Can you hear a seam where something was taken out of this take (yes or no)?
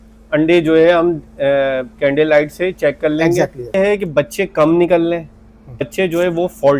yes